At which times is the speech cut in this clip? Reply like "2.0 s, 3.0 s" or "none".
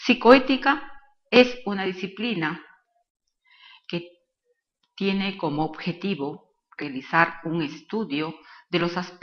8.1 s